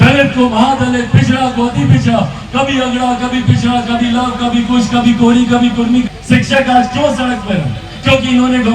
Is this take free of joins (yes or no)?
no